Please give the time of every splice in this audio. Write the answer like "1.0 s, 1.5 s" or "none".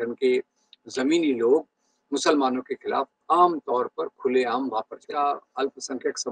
5.1 s